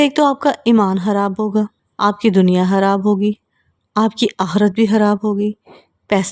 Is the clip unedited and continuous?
no; 1 cut; at 1.8 s

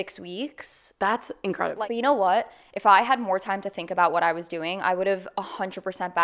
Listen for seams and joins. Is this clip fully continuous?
no; 1 cut; at 1.7 s

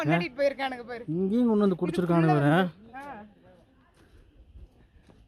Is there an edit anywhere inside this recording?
no; 0 cuts

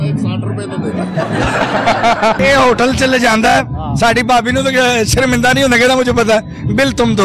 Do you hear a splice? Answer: no; 0 cuts

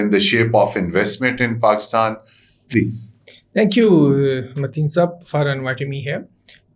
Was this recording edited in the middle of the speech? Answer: no; 0 cuts

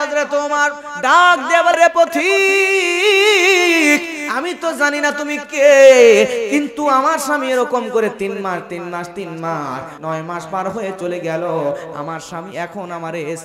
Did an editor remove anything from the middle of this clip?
yes; 2 cuts; at 1.8 s, 9.9 s

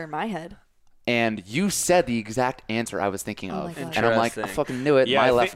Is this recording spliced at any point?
no; 0 cuts

